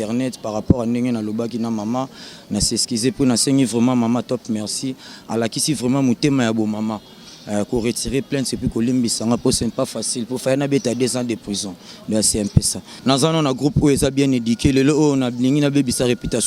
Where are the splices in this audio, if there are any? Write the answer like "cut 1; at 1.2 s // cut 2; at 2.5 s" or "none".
cut 1; at 12.8 s